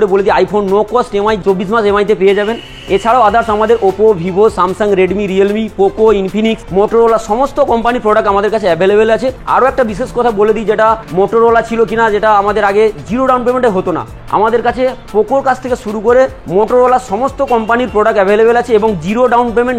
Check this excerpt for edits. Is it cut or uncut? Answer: uncut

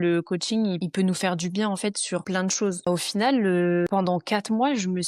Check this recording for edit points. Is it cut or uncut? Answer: cut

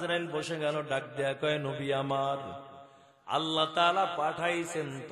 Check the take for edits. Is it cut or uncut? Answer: uncut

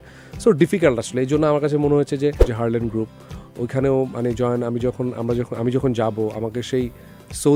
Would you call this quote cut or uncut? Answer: cut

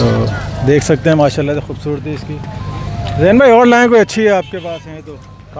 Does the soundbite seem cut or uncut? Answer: uncut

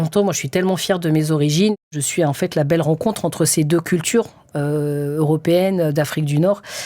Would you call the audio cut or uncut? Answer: cut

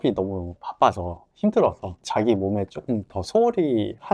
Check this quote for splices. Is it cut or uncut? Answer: cut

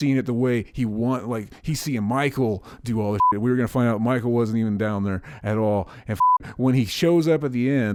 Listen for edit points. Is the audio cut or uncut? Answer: uncut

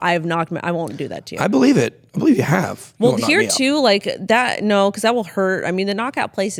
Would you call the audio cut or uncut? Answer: uncut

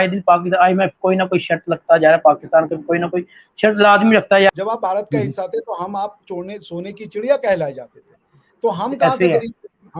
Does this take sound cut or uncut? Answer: cut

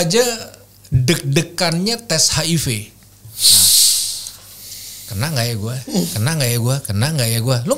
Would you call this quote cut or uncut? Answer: uncut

